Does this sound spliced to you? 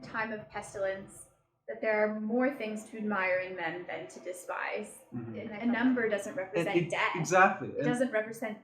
yes; 1 cut; at 5.5 s

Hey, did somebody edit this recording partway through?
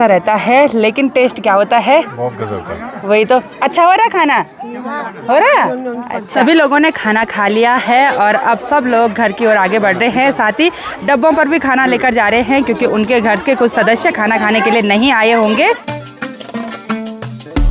no; 0 cuts

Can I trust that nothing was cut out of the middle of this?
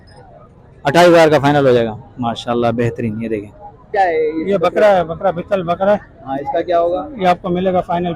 no; 1 cut; at 3.9 s

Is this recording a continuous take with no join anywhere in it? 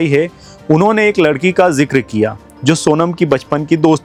yes; 0 cuts

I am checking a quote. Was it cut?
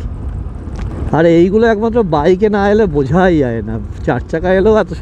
yes; 1 cut; at 0.9 s

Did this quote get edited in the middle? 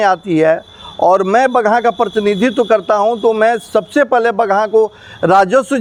no; 0 cuts

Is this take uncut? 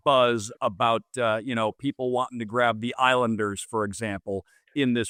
yes; 0 cuts

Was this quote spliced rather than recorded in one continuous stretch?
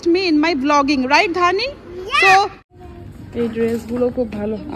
yes; 1 cut; at 2.6 s

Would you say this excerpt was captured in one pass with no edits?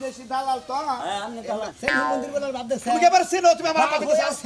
no; 1 cut; at 1.7 s

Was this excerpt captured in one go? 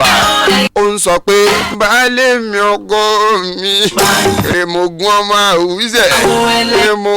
no; 1 cut; at 1.7 s

